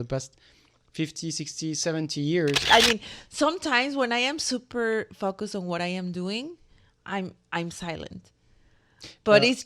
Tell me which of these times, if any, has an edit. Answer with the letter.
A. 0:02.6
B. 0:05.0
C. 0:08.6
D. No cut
A